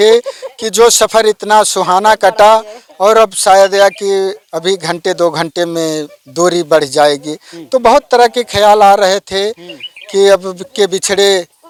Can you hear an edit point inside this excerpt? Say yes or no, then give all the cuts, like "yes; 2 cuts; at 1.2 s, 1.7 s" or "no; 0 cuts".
no; 0 cuts